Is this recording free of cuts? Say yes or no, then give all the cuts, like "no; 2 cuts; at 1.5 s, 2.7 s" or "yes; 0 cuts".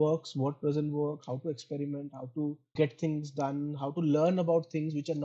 yes; 0 cuts